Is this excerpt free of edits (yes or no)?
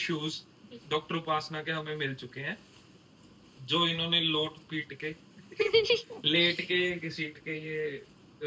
yes